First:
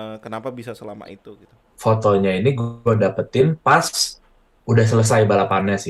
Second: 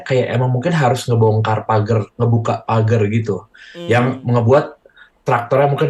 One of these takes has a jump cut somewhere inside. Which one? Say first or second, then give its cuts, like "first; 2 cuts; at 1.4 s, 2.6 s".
first; 1 cut; at 1.7 s